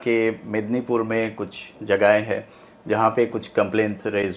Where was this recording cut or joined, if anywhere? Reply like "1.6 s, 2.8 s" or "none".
none